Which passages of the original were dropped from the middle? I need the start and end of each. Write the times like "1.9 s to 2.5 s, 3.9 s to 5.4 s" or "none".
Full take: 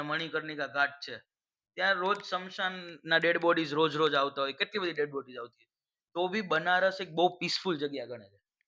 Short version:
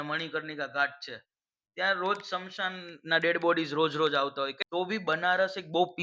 4.6 s to 6.0 s